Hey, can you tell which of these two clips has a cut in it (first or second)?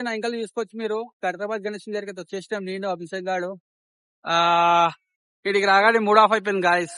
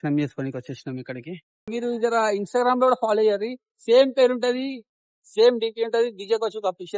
second